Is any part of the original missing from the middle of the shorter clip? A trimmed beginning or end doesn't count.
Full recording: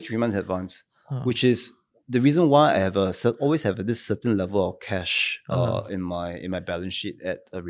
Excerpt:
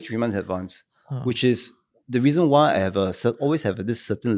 no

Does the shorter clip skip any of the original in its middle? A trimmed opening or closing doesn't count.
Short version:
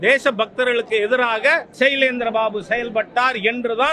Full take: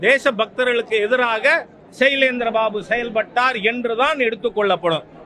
yes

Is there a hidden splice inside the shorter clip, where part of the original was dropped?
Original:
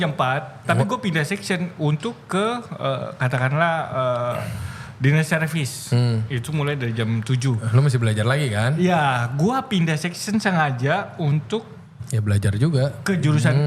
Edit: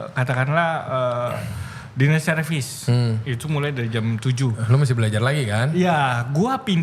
no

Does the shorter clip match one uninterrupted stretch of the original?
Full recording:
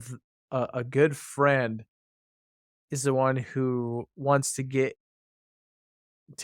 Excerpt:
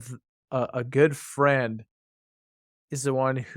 yes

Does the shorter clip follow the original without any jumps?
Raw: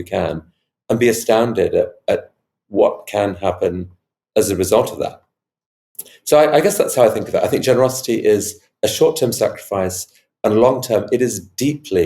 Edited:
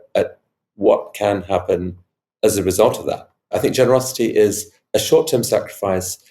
no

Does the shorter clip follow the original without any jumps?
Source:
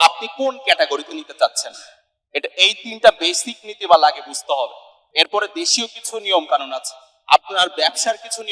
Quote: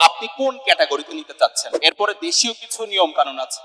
no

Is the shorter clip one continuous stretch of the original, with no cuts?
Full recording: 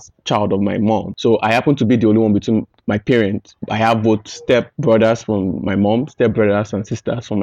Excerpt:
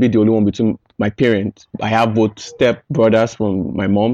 yes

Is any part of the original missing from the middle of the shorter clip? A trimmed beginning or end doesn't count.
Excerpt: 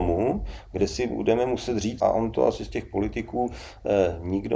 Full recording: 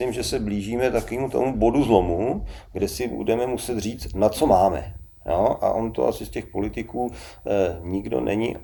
yes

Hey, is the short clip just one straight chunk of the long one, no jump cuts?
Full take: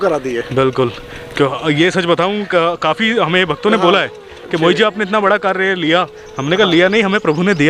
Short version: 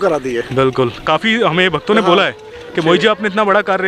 no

